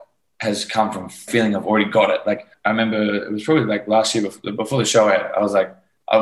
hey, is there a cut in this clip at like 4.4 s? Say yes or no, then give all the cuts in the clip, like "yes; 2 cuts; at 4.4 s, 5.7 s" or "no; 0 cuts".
no; 2 cuts; at 1.3 s, 2.5 s